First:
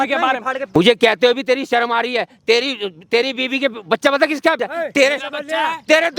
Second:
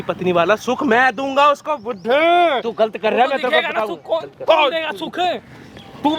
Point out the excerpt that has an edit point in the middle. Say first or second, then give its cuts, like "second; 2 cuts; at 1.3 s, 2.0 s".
first; 2 cuts; at 0.7 s, 4.6 s